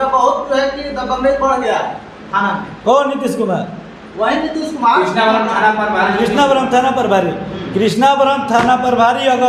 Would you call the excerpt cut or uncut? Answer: uncut